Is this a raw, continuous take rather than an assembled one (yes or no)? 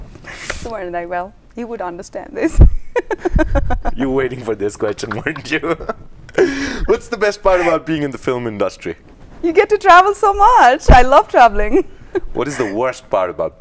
yes